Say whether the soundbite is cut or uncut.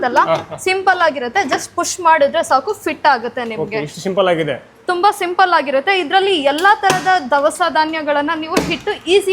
uncut